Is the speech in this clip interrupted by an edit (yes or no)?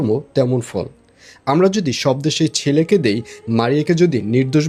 no